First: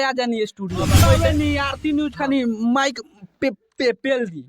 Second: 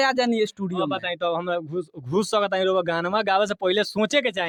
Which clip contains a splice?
first; 1 cut; at 1.0 s

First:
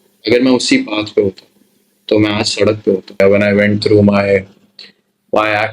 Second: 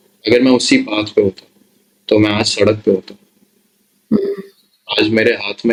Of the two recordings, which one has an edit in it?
first; 1 cut; at 3.4 s

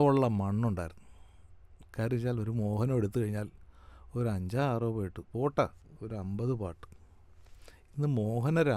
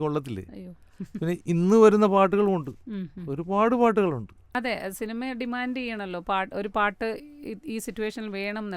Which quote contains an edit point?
second; 1 cut; at 4.4 s

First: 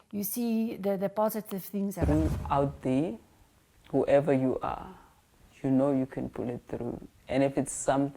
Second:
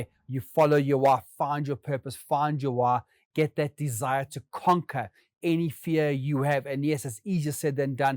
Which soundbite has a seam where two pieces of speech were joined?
first; 1 cut; at 2.0 s

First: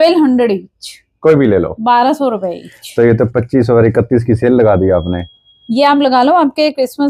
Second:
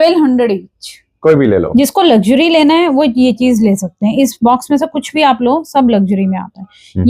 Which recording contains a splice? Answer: second; 1 cut; at 1.7 s

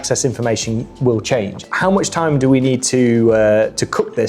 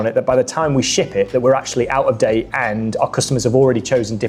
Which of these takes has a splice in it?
first; 1 cut; at 1.7 s

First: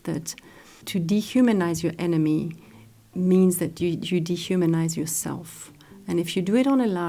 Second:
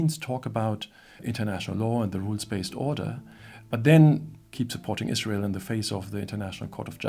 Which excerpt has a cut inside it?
second; 2 cuts; at 1.2 s, 4.3 s

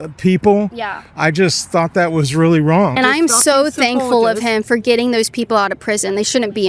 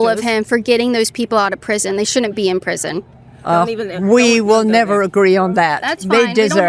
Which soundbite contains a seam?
first; 1 cut; at 3.0 s

